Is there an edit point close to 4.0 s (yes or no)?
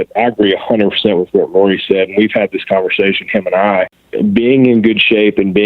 yes